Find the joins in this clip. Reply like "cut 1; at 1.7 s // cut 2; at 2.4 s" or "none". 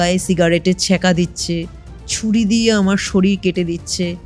none